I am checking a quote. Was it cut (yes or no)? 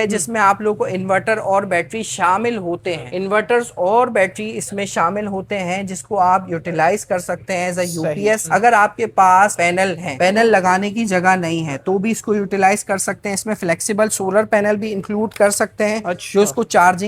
no